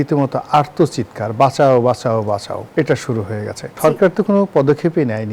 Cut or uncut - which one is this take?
cut